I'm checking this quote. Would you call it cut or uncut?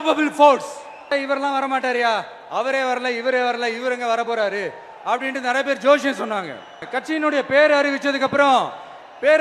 cut